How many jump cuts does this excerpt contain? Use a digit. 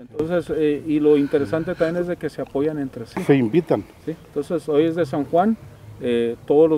0